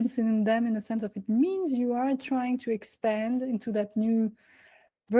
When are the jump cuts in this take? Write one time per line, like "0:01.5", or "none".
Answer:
none